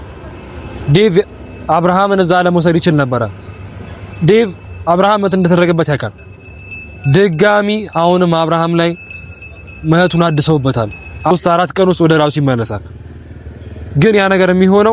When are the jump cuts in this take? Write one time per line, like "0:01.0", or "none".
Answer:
0:11.3